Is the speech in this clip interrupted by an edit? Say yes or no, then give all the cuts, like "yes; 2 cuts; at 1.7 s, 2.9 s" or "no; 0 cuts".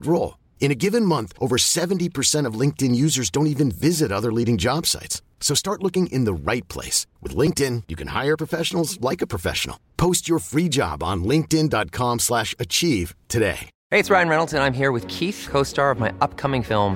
yes; 1 cut; at 13.7 s